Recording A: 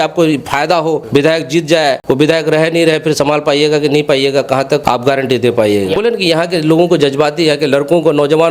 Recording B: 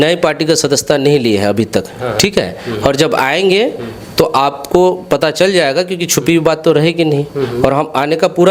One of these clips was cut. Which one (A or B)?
A